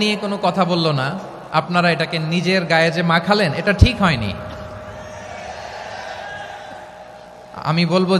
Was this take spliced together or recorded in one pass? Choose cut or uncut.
uncut